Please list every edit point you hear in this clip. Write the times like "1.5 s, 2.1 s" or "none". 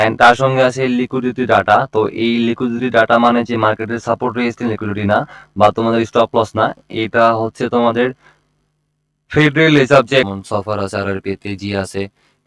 10.3 s